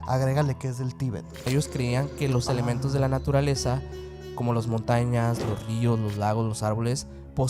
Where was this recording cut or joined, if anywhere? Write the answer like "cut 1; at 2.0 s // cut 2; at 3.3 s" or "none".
cut 1; at 1.5 s